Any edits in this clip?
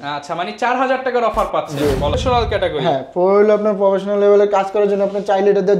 yes; 1 cut; at 2.1 s

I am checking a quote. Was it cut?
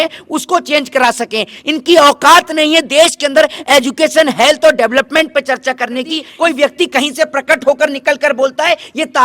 yes; 1 cut; at 6.3 s

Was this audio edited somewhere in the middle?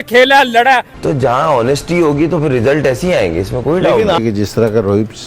yes; 2 cuts; at 0.9 s, 4.2 s

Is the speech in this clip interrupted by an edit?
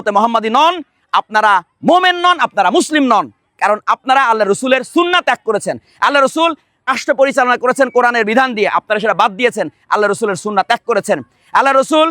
yes; 1 cut; at 7.0 s

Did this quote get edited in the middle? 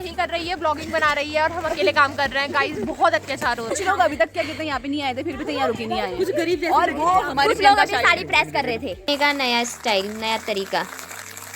yes; 2 cuts; at 3.7 s, 9.0 s

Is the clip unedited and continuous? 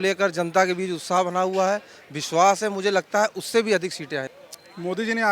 no; 1 cut; at 4.3 s

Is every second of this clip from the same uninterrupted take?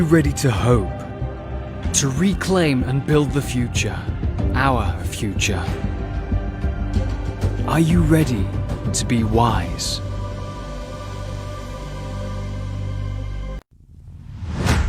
no; 1 cut; at 13.6 s

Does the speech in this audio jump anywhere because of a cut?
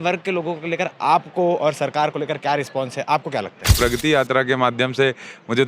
yes; 1 cut; at 3.8 s

